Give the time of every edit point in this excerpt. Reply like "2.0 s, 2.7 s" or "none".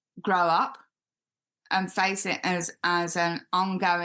none